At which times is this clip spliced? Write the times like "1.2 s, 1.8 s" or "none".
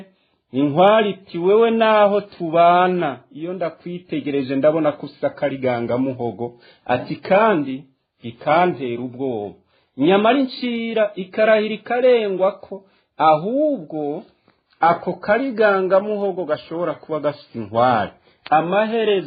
none